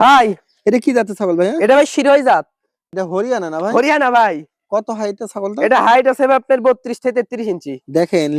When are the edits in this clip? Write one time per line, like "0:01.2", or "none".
0:02.9